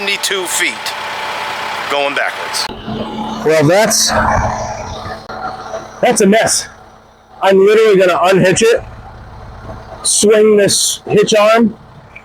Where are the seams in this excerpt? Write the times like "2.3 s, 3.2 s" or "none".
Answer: 2.6 s